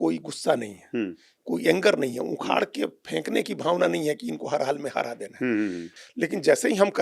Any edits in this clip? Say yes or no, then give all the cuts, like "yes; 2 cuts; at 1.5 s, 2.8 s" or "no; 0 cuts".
yes; 1 cut; at 6.0 s